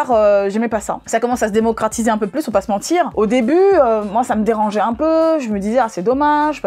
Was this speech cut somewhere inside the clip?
no; 0 cuts

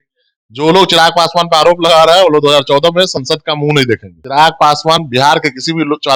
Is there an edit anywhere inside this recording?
yes; 1 cut; at 4.1 s

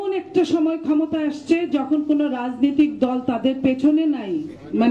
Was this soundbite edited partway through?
no; 0 cuts

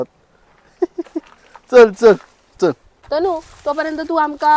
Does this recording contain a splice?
yes; 1 cut; at 2.9 s

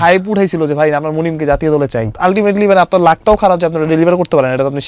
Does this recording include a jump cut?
yes; 1 cut; at 2.1 s

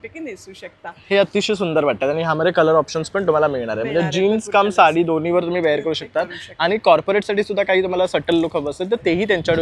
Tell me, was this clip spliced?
no; 0 cuts

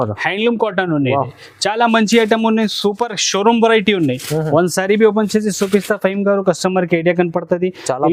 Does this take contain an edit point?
no; 0 cuts

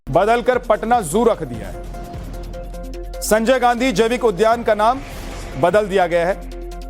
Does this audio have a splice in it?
no; 0 cuts

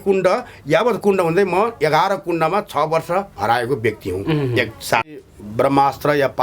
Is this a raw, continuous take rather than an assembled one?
no; 1 cut; at 5.2 s

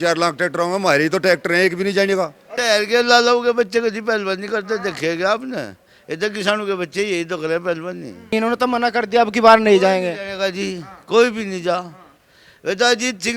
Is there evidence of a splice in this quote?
yes; 2 cuts; at 2.5 s, 8.1 s

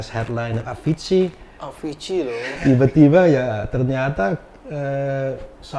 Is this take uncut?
no; 1 cut; at 2.6 s

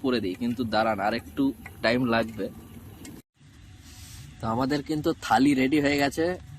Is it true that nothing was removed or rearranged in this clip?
no; 1 cut; at 3.3 s

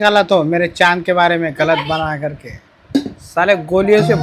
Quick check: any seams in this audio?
no; 0 cuts

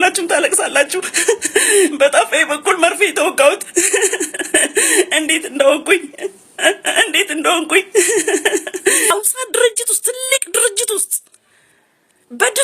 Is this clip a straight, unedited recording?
no; 1 cut; at 9.1 s

